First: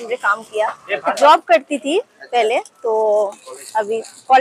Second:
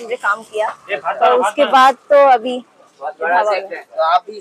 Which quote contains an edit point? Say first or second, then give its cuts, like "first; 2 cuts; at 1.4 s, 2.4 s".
first; 1 cut; at 1.2 s